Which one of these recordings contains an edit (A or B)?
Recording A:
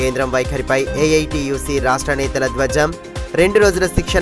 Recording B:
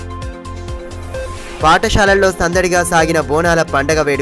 B